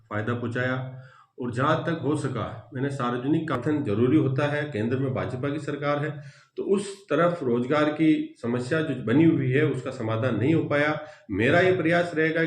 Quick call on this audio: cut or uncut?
cut